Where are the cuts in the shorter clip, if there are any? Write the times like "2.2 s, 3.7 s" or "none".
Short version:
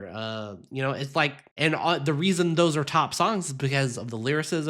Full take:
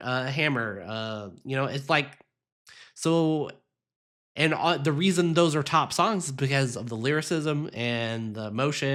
1.4 s